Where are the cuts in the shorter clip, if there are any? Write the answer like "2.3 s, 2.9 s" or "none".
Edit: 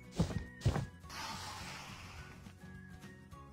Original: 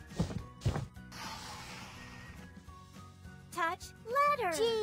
none